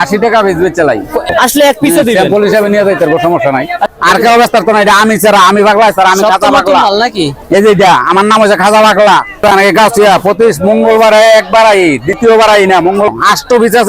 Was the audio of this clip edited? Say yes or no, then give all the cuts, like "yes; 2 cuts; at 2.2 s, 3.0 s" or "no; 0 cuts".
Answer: yes; 4 cuts; at 1.3 s, 3.9 s, 9.4 s, 13.1 s